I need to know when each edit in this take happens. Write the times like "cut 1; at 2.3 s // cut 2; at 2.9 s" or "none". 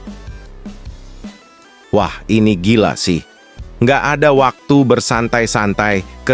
cut 1; at 1.8 s